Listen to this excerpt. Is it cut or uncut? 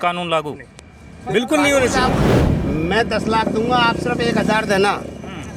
cut